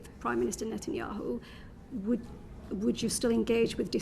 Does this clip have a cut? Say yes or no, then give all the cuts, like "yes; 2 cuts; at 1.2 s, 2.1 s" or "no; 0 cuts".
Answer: no; 0 cuts